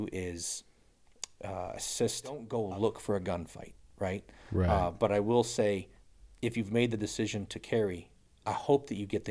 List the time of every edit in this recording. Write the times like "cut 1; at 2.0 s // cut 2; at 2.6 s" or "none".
cut 1; at 2.5 s